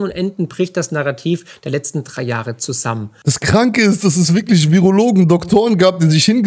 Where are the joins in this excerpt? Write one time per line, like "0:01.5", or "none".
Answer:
0:03.1